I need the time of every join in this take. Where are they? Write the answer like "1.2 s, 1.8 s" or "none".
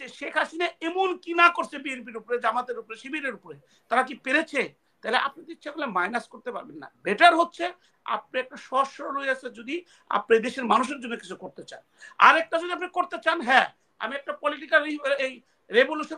none